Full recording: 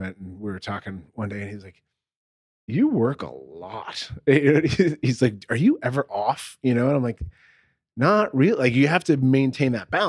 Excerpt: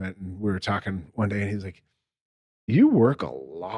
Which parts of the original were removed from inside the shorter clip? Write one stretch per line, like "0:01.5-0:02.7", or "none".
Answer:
none

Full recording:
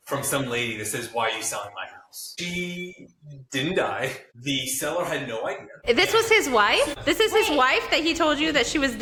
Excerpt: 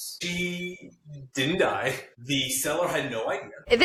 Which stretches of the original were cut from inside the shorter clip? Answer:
none

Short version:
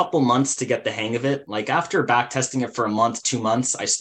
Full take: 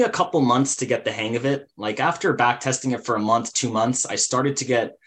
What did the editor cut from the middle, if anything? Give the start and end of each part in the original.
0:01.7-0:01.8

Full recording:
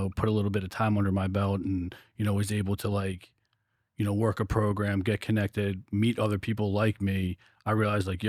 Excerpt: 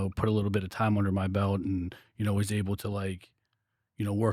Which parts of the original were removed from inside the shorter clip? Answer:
none

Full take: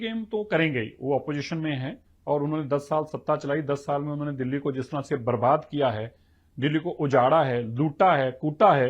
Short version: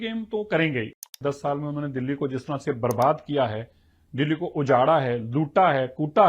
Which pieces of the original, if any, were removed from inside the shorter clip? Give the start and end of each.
0:01.1-0:03.5

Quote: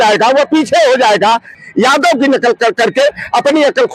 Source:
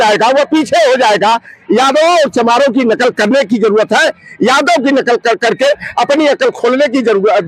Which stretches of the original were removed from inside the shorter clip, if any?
0:01.6-0:04.2

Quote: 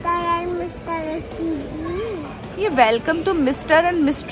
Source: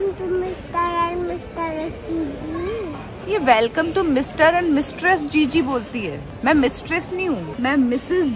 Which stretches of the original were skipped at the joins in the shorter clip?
none

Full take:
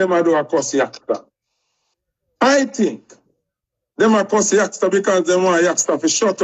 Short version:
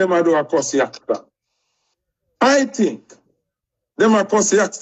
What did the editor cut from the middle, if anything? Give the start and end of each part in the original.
none

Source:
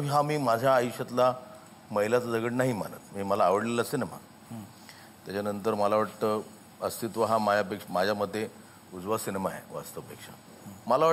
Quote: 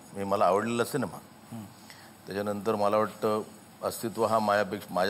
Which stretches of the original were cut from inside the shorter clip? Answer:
none

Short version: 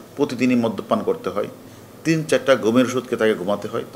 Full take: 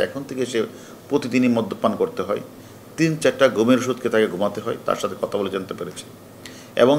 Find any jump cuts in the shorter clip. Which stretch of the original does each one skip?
none

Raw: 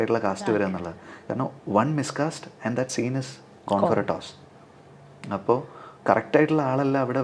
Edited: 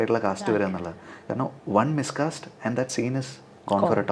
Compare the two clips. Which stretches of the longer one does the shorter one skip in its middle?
none

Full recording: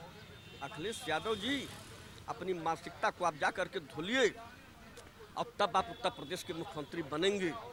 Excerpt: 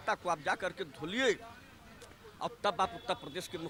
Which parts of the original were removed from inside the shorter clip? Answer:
none

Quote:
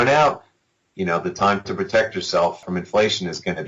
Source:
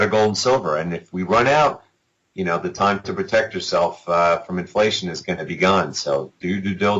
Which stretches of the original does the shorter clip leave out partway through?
0:04.0-0:04.4

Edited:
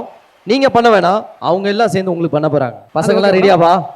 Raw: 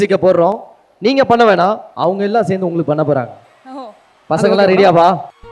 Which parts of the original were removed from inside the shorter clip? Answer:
0:03.4-0:04.2

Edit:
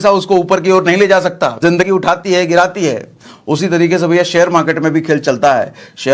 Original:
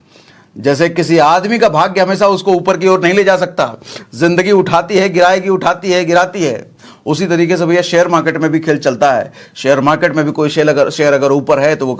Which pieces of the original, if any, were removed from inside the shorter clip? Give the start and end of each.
0:04.0-0:05.4

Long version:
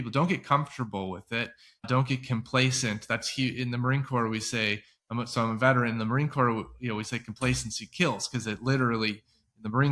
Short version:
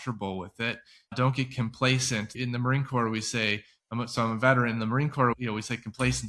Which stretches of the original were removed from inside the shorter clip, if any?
0:03.1-0:03.5
0:06.5-0:06.8

